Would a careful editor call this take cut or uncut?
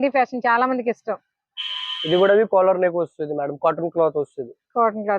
uncut